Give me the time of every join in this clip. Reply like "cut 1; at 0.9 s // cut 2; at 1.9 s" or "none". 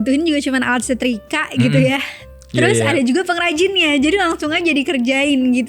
none